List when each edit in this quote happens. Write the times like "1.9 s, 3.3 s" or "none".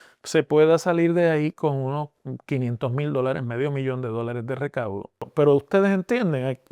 5.3 s